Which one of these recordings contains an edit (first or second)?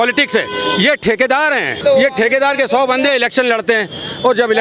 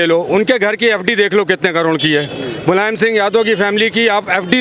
first